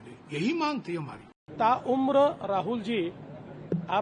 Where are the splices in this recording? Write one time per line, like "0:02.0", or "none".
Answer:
0:01.5

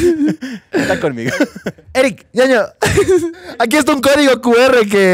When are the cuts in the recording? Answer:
0:01.8
0:03.4

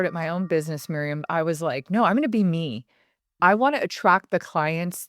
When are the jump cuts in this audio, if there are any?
0:01.2

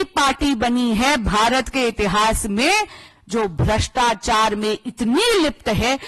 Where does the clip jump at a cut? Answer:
none

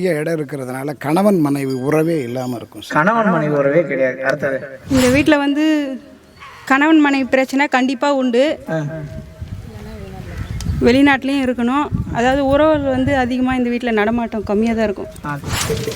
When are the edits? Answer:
0:04.7

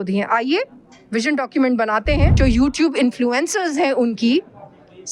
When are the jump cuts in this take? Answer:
0:02.3

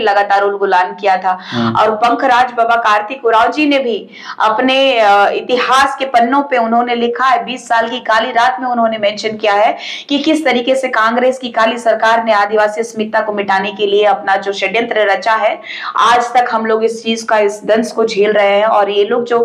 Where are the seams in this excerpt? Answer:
none

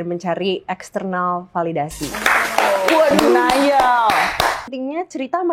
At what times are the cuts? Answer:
0:04.6

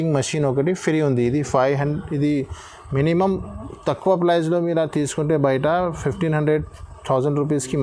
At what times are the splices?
none

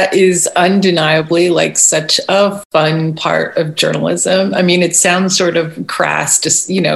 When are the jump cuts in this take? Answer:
none

